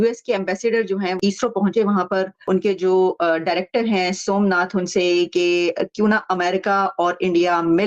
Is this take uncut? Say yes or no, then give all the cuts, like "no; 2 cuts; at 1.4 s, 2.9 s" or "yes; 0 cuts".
no; 2 cuts; at 1.2 s, 2.4 s